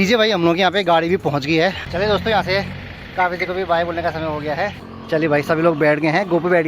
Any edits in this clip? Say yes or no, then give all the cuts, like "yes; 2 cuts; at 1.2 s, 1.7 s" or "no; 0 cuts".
yes; 2 cuts; at 1.8 s, 4.9 s